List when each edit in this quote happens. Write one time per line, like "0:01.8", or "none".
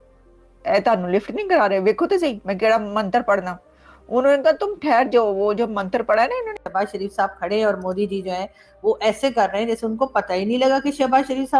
0:06.6